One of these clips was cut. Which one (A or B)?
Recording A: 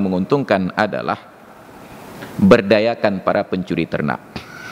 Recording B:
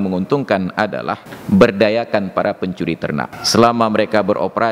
B